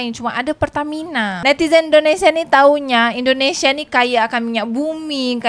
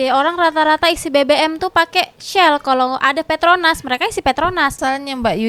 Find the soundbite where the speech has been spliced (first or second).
first